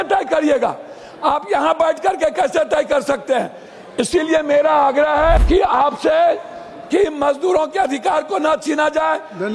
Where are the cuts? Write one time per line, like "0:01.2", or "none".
0:05.4